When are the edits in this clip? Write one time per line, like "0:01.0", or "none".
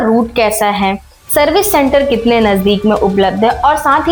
none